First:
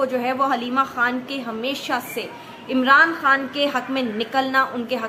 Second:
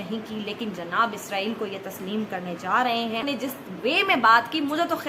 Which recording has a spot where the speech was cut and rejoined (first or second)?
second